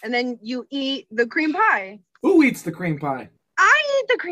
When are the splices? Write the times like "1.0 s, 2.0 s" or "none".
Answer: 3.4 s